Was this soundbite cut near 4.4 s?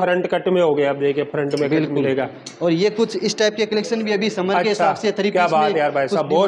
no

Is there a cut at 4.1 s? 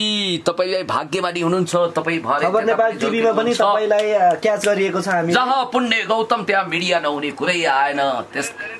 no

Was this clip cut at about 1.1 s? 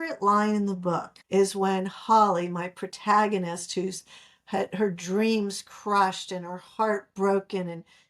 yes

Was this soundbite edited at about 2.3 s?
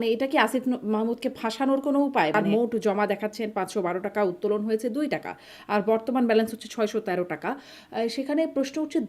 yes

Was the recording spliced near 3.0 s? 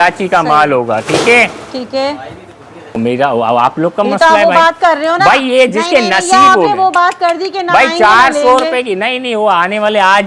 yes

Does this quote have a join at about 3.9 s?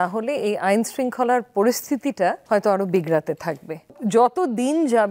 yes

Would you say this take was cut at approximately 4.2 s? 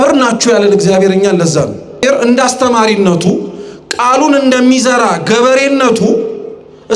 no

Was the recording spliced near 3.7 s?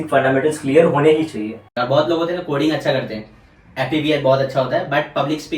no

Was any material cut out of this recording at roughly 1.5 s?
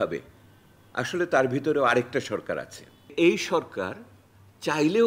no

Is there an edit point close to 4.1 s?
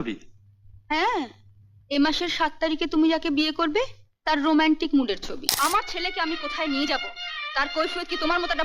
no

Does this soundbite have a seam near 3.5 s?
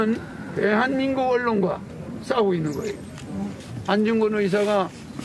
yes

